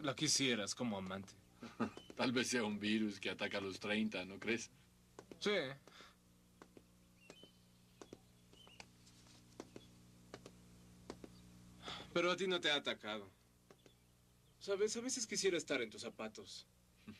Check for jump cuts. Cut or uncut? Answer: cut